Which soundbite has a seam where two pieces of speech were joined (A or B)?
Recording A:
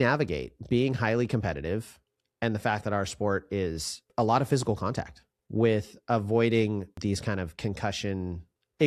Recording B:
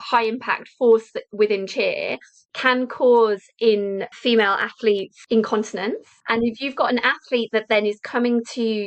B